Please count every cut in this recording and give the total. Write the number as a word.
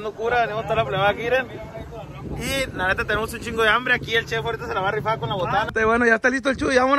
one